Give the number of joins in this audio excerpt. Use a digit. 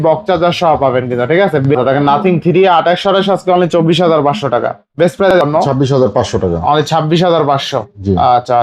2